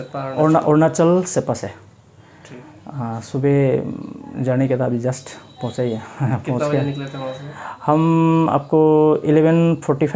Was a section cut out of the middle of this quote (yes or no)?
no